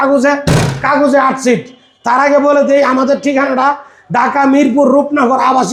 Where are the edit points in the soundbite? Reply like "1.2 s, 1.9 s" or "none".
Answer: none